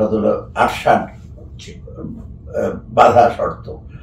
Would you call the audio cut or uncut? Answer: uncut